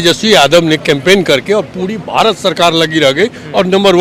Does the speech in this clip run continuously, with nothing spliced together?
yes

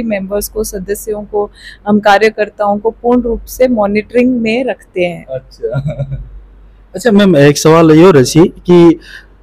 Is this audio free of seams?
yes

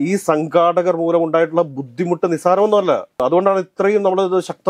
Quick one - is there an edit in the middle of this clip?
no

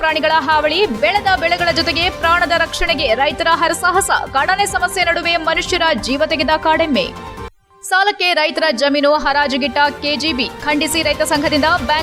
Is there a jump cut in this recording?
no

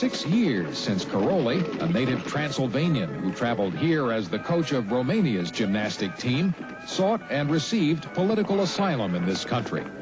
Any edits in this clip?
yes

